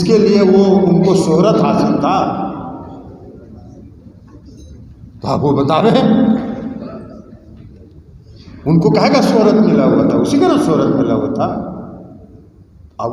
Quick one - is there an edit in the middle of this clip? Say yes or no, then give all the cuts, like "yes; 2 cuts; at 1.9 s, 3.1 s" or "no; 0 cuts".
no; 0 cuts